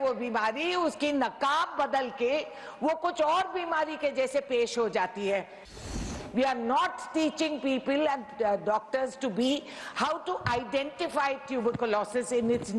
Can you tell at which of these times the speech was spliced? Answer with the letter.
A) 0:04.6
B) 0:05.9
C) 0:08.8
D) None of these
B